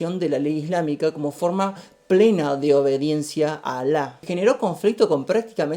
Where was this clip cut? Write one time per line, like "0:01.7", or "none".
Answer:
0:04.2